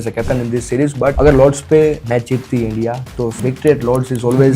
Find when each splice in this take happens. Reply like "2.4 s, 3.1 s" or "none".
1.1 s, 2.0 s, 3.4 s